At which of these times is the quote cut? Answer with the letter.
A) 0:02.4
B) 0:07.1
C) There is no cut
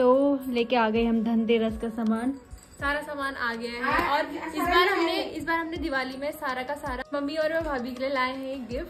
B